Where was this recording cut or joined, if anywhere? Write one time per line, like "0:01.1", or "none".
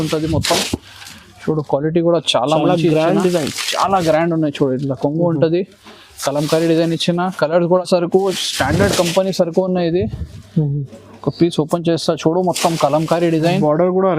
0:07.8